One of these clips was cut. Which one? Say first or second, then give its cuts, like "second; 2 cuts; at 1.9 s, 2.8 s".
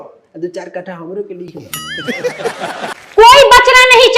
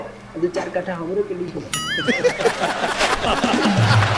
first; 1 cut; at 2.9 s